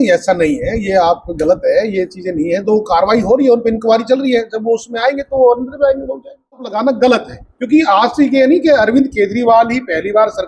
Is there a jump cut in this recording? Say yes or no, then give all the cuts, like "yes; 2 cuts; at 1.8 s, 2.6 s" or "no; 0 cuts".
yes; 1 cut; at 6.7 s